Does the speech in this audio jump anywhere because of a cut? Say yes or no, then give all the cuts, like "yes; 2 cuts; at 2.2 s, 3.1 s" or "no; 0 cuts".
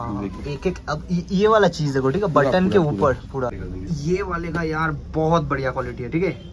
yes; 1 cut; at 3.7 s